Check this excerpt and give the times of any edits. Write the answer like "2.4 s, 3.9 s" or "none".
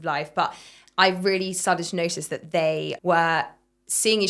2.9 s